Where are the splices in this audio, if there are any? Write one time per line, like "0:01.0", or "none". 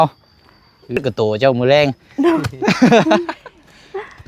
0:01.0